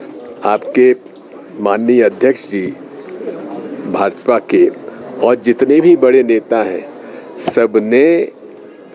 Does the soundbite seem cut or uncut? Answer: uncut